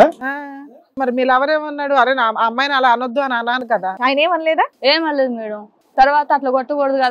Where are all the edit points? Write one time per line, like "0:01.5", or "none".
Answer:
0:01.0
0:03.8